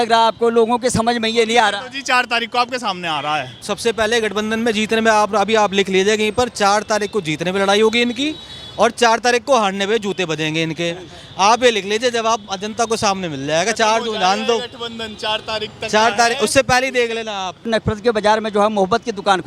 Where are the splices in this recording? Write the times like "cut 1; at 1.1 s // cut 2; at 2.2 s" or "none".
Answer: cut 1; at 3.6 s // cut 2; at 17.7 s